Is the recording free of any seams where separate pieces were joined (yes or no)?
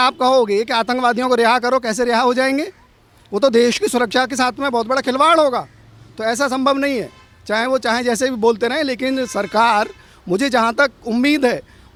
yes